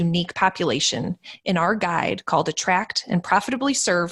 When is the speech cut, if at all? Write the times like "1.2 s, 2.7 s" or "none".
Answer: none